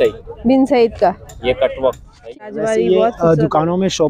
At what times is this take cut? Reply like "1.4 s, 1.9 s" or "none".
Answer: 2.3 s